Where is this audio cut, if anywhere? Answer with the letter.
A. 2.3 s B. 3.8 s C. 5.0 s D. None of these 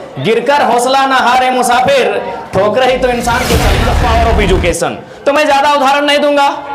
B